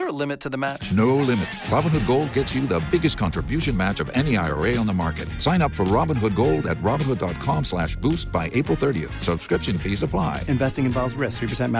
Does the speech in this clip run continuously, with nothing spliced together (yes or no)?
yes